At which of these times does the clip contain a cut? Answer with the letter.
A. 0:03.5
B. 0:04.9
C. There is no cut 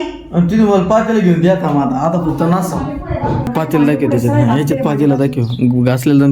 A